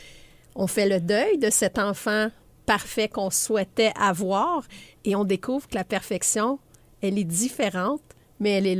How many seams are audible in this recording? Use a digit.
0